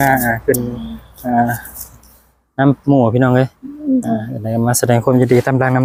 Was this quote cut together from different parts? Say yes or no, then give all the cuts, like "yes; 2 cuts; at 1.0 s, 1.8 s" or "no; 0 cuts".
no; 0 cuts